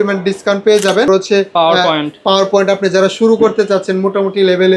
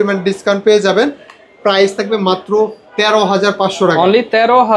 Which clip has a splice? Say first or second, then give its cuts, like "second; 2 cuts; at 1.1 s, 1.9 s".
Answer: first; 1 cut; at 1.1 s